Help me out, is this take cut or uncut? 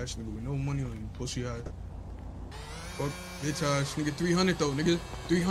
cut